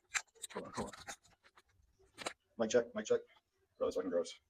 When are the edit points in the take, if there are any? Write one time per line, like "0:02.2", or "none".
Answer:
none